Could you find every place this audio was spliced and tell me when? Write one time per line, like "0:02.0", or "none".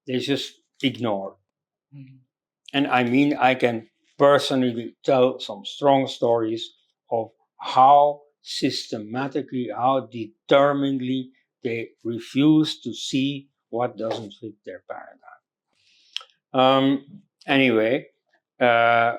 none